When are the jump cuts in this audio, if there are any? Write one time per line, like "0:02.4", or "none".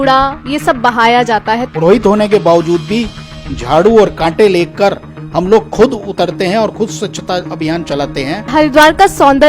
0:01.7
0:08.5